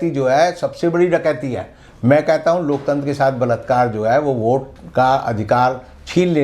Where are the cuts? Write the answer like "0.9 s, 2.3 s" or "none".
none